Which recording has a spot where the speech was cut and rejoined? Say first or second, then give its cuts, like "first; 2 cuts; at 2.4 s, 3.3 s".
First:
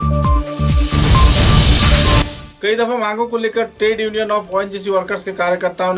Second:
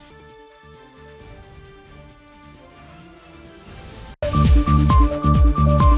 first; 1 cut; at 2.3 s